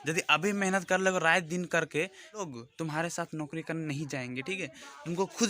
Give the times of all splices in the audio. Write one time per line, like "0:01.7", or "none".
0:02.5